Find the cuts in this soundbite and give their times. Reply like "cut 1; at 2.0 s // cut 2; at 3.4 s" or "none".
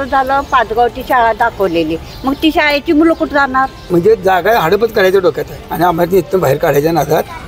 cut 1; at 3.8 s // cut 2; at 5.7 s